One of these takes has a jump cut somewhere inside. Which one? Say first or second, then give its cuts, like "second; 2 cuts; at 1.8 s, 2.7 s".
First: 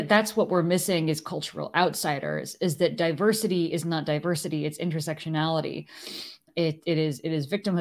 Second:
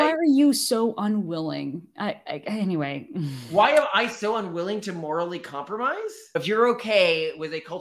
second; 1 cut; at 6.3 s